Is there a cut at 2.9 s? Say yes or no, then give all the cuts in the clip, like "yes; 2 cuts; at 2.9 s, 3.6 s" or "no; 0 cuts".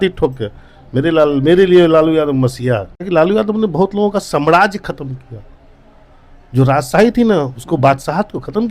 yes; 1 cut; at 2.9 s